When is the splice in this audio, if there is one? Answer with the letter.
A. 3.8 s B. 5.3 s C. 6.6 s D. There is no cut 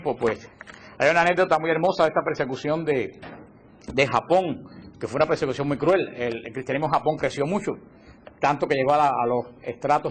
B